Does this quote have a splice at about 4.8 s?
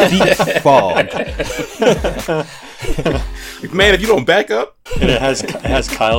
yes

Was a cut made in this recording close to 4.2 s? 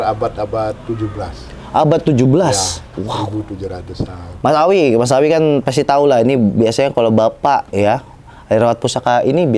yes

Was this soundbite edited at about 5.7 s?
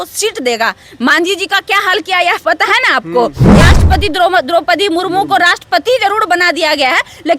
no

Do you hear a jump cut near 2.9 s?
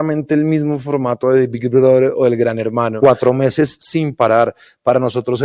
yes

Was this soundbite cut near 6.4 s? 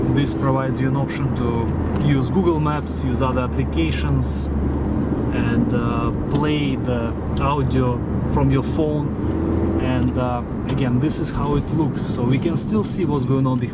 no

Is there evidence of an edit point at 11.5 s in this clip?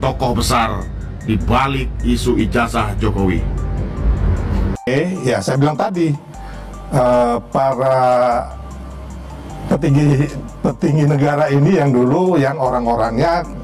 no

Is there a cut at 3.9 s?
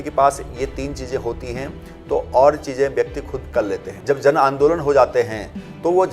yes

